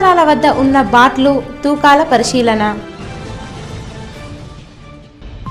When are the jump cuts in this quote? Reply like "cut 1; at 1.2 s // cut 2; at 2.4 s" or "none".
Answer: none

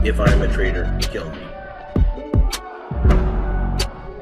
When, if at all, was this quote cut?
cut 1; at 1.6 s

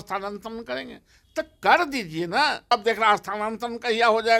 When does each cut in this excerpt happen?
cut 1; at 2.7 s

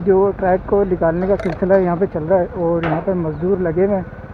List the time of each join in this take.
none

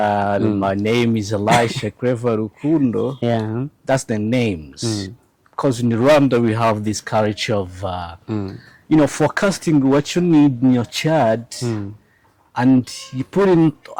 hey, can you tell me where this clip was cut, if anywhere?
none

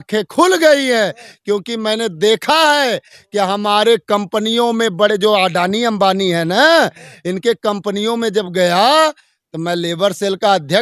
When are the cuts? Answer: none

